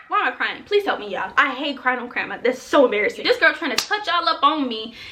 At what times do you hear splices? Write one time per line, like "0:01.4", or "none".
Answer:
0:01.3
0:03.2